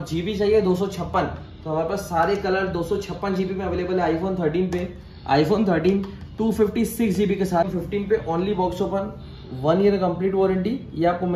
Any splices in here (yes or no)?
yes